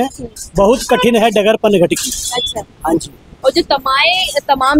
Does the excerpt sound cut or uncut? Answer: uncut